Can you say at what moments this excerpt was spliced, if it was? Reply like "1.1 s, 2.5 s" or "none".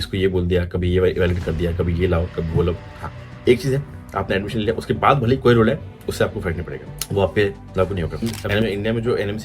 2.8 s, 8.4 s